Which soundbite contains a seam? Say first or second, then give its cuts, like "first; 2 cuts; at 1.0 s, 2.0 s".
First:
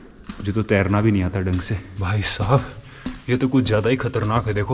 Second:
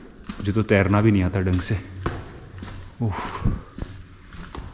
first; 1 cut; at 1.9 s